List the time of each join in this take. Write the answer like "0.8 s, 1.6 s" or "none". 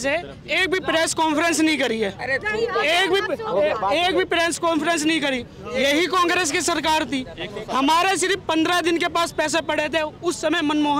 none

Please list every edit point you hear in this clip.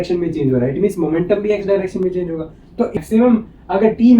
3.0 s

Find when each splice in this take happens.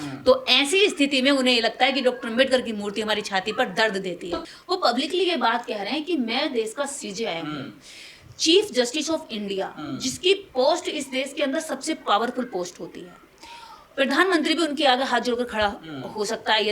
4.4 s

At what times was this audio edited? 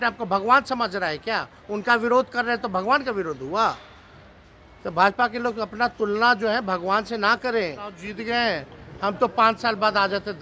8.1 s

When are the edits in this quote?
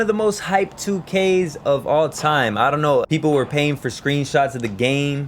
3.1 s

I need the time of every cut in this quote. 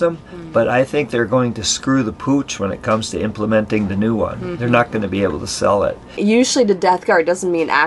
6.2 s

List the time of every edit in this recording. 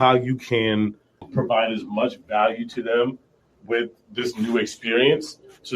1.2 s

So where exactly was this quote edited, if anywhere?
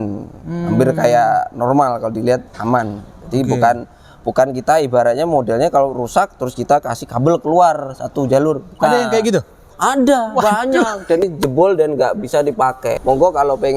11.3 s, 13.0 s

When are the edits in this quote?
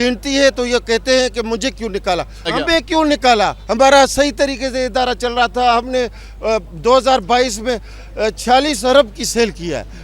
2.5 s

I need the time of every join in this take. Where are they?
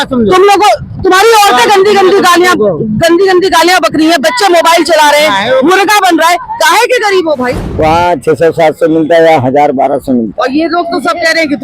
7.6 s

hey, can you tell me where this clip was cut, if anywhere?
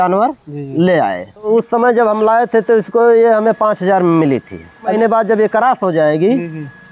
1.5 s, 4.9 s

